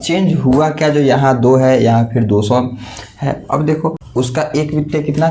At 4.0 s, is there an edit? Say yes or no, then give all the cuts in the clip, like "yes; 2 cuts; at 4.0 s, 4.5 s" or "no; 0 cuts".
yes; 1 cut; at 4.0 s